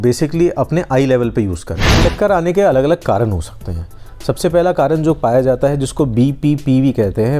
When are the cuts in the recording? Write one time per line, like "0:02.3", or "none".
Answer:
0:01.9

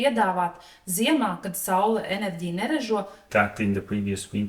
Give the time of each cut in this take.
0:03.2

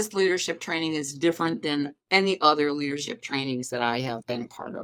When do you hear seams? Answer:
none

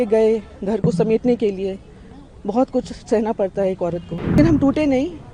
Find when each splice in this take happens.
0:04.4

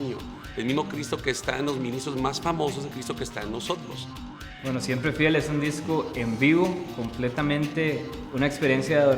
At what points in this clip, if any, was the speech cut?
0:04.4

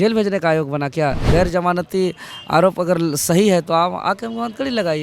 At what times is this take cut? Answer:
0:01.2

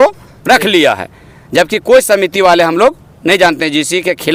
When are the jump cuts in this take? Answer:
none

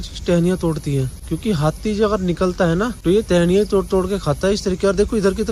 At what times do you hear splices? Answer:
0:01.2
0:03.0

